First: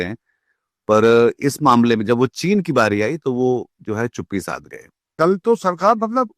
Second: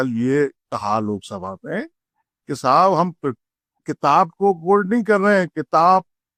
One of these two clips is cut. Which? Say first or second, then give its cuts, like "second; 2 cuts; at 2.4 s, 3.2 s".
first; 1 cut; at 5.1 s